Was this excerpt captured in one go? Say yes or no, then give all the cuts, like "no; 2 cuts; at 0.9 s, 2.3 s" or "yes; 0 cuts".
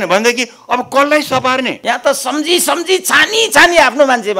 no; 1 cut; at 1.8 s